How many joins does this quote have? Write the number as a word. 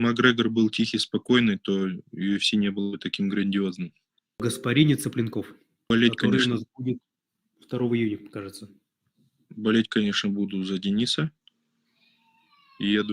two